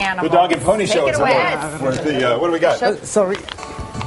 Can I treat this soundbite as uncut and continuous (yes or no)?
no